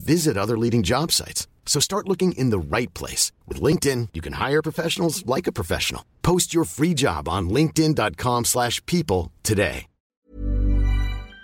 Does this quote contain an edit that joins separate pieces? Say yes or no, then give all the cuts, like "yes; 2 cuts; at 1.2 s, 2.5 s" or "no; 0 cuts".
yes; 1 cut; at 10.3 s